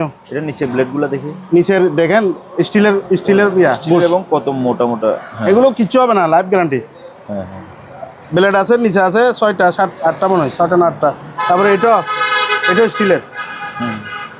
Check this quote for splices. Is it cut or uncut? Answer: uncut